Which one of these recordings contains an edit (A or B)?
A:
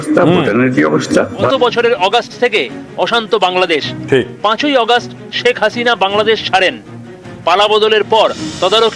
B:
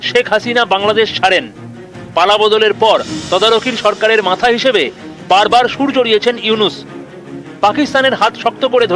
A